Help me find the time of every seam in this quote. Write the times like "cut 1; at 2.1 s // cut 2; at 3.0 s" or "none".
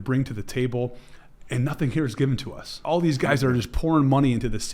cut 1; at 2.8 s